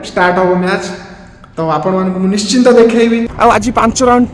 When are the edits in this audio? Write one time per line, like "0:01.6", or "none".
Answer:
0:03.3